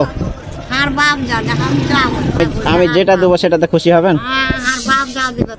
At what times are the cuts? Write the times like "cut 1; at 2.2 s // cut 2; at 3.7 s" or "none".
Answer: cut 1; at 2.4 s